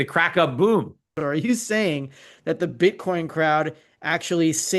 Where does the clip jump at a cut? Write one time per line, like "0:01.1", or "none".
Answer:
0:01.1